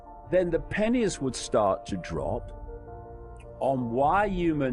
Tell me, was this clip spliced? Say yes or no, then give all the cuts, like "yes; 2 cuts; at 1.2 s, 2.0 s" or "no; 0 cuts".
no; 0 cuts